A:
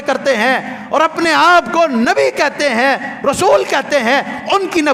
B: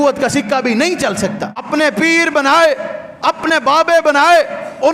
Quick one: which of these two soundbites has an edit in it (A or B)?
B